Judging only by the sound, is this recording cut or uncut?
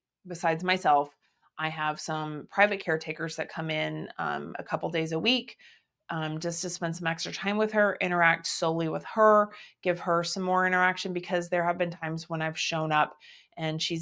uncut